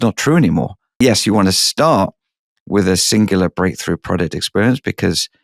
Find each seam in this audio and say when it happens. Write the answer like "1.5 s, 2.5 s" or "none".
1.0 s